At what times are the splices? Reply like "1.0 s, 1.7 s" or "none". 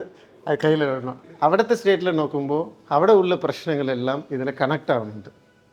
1.2 s